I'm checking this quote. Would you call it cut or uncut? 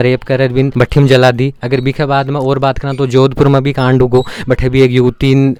uncut